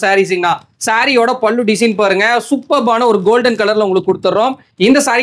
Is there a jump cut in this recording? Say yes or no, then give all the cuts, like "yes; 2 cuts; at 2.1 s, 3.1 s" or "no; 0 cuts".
no; 0 cuts